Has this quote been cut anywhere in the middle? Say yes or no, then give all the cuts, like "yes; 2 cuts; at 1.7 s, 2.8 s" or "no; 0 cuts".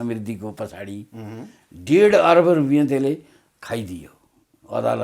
no; 0 cuts